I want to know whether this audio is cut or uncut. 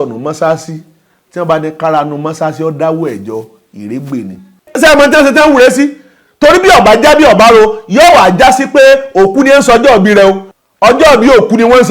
cut